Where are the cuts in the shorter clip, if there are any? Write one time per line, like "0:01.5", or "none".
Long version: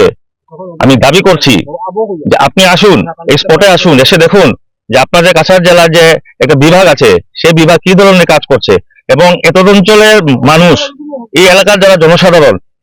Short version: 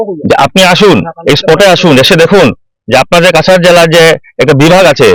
none

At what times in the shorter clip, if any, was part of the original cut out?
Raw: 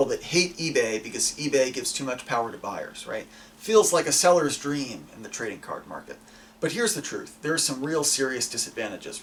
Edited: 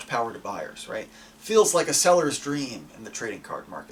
none

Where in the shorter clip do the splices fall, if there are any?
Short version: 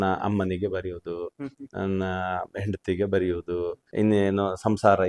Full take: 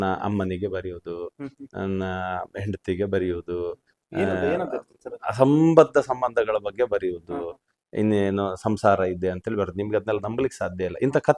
0:03.8

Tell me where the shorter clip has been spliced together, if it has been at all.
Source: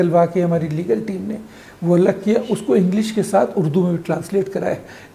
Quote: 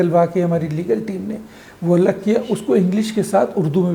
none

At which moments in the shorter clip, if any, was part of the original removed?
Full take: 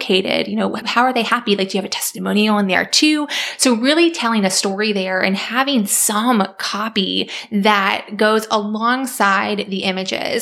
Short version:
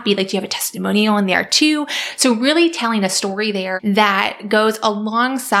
0:03.7

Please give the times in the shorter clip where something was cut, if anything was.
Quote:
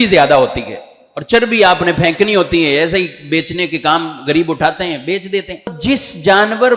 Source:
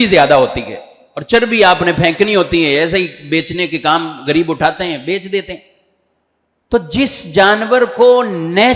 0:05.8

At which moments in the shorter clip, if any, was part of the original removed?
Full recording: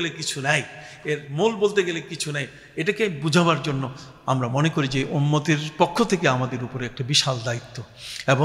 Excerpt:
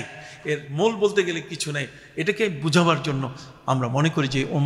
none

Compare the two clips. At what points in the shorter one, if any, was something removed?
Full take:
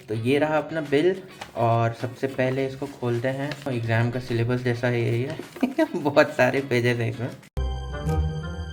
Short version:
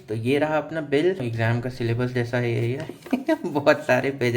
0:01.3

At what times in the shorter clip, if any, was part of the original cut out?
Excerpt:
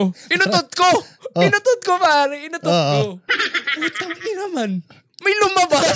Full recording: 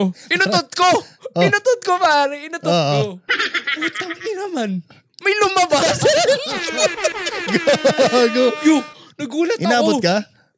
none

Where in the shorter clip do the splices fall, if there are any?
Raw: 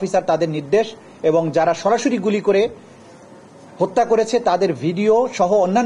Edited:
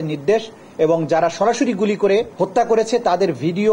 0:02.3

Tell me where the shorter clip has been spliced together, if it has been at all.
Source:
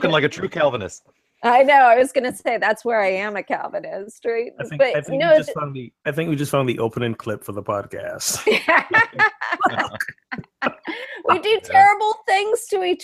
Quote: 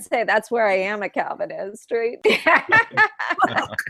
0:02.2

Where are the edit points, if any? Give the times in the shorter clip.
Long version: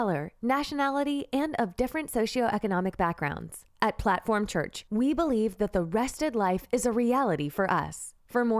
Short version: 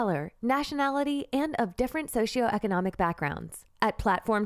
none

